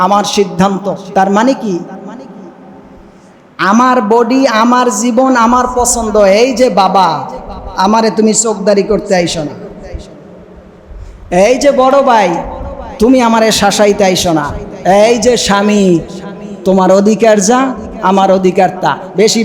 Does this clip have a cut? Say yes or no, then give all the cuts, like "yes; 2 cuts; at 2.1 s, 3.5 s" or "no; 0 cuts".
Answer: no; 0 cuts